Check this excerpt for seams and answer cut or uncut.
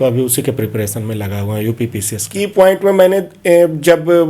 cut